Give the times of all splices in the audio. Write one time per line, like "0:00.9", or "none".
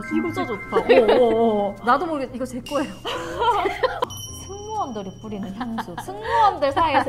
0:04.0